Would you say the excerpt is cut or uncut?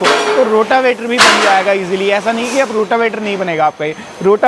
uncut